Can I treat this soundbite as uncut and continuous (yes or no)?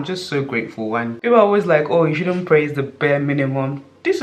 no